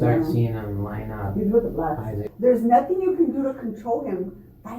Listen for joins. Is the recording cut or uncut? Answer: cut